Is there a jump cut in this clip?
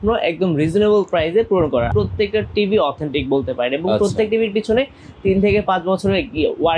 yes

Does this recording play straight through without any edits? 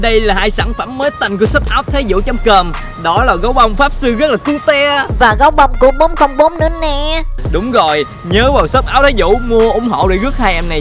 yes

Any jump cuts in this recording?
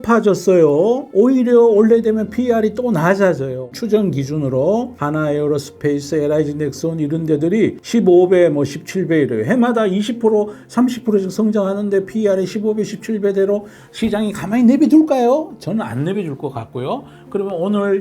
yes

